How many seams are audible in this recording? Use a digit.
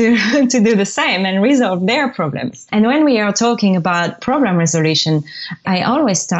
3